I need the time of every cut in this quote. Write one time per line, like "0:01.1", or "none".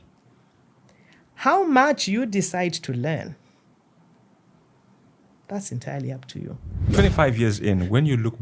0:06.9

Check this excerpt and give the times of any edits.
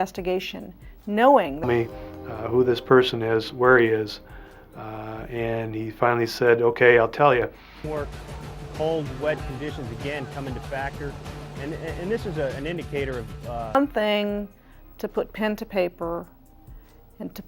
0:01.6
0:07.8
0:13.7

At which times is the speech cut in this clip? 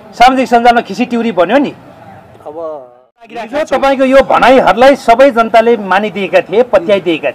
0:03.5

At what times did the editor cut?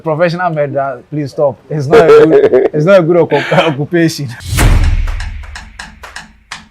none

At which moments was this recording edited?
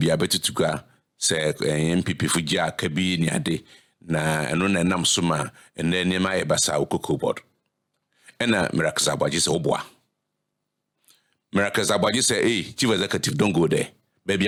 none

